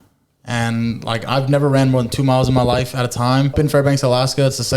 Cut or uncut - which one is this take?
cut